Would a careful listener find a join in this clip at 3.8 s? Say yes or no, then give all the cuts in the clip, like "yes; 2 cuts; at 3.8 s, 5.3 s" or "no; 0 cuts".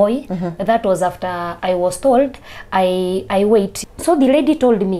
yes; 1 cut; at 3.8 s